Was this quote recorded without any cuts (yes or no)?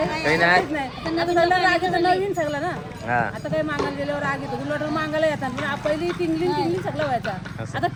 yes